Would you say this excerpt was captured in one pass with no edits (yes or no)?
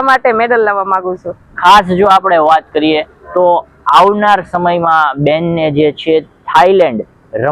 no